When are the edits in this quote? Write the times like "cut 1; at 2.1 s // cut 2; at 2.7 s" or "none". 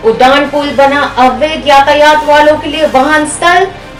none

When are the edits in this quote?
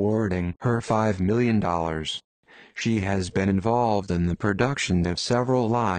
cut 1; at 1.1 s

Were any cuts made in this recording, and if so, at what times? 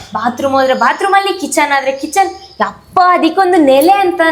none

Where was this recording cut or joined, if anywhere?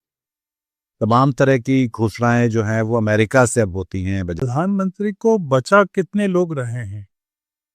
cut 1; at 4.4 s

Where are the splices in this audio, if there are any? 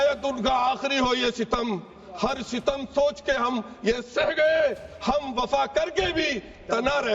none

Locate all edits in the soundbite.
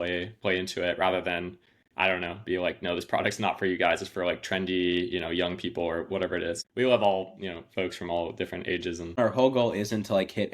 cut 1; at 6.6 s // cut 2; at 9.2 s

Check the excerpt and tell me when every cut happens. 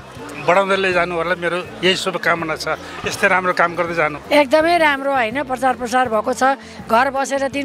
cut 1; at 4.2 s

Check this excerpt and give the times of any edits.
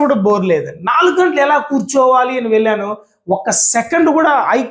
none

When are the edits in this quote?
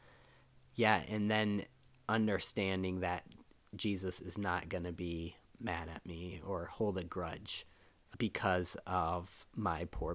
cut 1; at 8.1 s

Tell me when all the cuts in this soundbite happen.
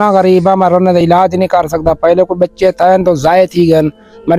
none

